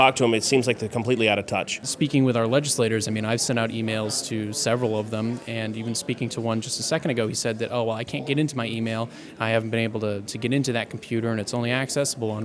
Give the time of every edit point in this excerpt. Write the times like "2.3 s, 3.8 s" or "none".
1.8 s